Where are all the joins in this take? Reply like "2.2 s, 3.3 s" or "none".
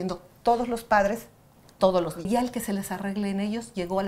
2.3 s